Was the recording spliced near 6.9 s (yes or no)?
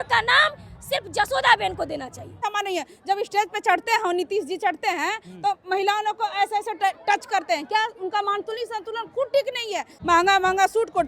no